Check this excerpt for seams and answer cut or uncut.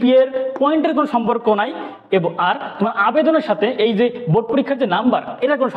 uncut